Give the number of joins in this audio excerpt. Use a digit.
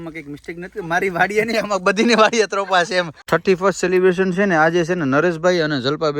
1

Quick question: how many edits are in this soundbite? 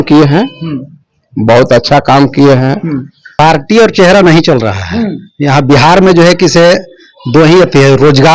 1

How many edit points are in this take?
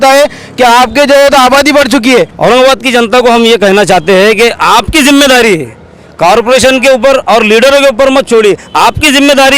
1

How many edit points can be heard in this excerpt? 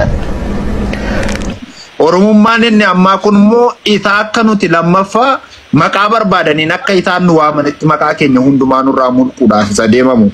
1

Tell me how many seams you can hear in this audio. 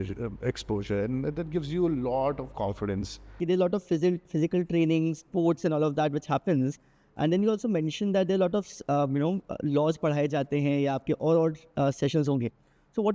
1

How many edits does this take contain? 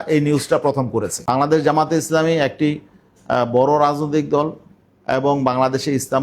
1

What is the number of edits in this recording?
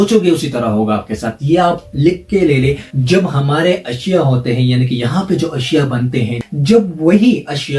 2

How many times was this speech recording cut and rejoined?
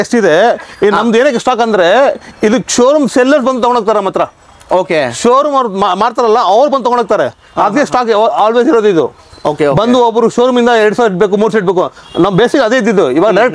0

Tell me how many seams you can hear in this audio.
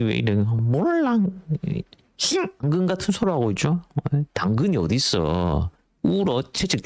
1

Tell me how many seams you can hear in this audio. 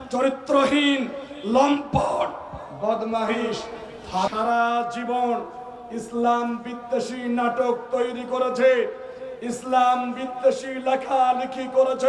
1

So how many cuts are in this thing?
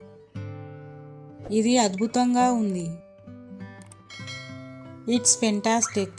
3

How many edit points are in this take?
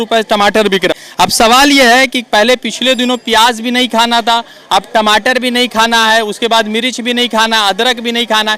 1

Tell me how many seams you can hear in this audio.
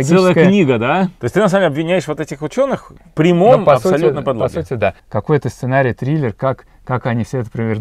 2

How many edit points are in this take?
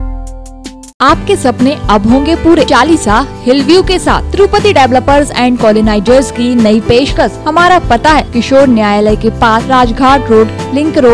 5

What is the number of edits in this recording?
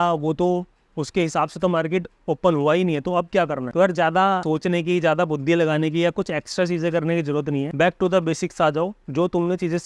3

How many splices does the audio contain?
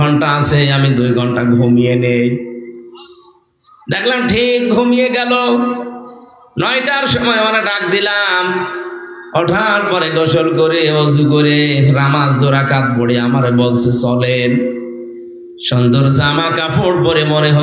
0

